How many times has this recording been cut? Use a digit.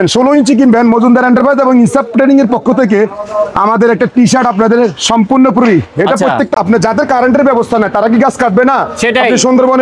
1